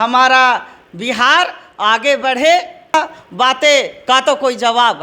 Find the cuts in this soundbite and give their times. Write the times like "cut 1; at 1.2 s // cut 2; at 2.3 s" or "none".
cut 1; at 2.9 s